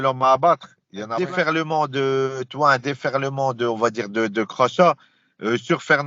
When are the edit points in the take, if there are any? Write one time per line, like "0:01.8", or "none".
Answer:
0:01.1